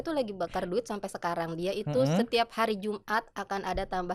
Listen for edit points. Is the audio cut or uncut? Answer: uncut